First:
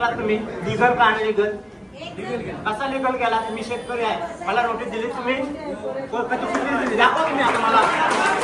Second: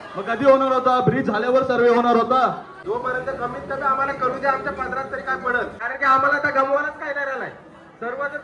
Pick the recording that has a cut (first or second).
second